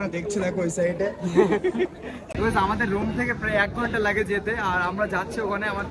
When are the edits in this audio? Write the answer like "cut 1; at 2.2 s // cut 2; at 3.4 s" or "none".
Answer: none